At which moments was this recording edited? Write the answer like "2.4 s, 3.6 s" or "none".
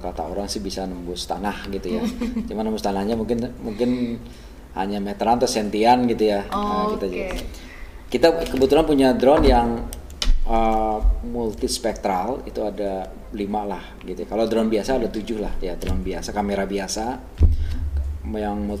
none